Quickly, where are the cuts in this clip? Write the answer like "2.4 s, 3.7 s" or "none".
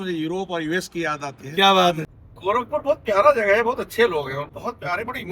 2.0 s, 4.4 s